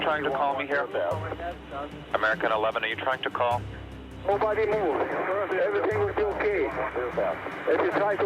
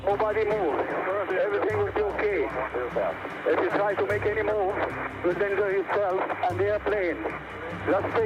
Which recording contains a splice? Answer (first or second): first